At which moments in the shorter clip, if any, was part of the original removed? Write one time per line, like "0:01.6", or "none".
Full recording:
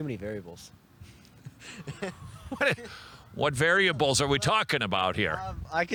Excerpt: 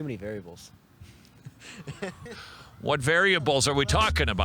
0:02.4